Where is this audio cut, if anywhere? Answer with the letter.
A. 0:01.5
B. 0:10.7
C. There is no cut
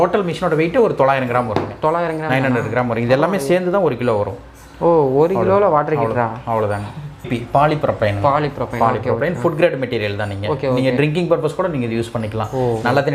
C